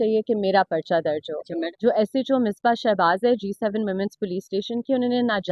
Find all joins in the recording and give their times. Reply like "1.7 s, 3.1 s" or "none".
1.7 s